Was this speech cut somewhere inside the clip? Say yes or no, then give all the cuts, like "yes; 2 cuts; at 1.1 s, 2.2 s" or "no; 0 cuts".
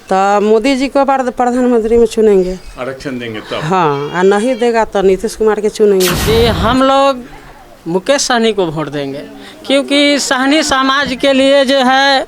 yes; 1 cut; at 6.2 s